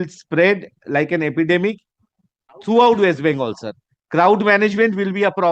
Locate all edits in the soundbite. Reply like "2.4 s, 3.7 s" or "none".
none